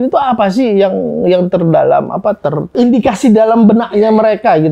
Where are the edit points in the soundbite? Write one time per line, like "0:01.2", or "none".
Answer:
none